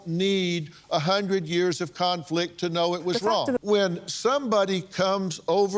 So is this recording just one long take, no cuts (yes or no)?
no